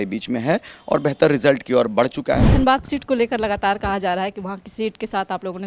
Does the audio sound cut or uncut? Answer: cut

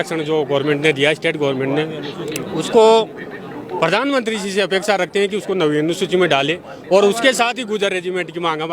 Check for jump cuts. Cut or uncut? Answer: uncut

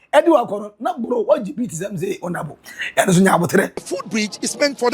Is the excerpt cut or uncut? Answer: cut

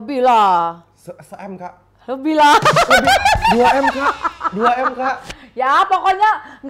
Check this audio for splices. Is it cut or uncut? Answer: uncut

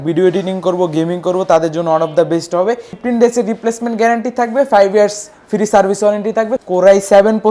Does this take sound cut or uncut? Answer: cut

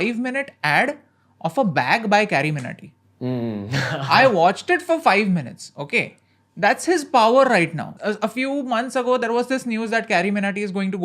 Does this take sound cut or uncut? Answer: cut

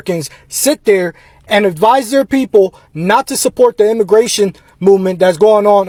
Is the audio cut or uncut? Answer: uncut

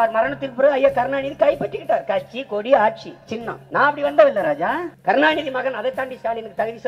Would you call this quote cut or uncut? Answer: cut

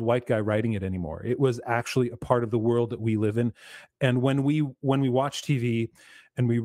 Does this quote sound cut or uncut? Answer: uncut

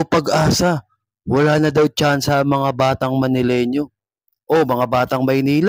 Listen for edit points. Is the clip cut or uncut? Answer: uncut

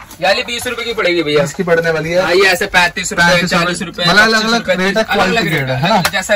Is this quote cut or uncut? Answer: uncut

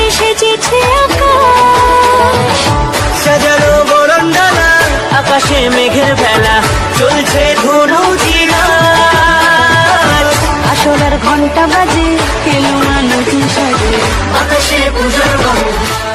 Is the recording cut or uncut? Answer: uncut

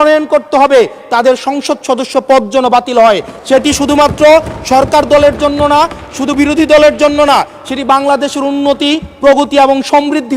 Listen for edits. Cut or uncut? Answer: uncut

